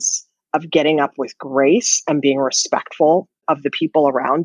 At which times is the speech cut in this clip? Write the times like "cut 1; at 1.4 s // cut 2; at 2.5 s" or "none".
cut 1; at 3.4 s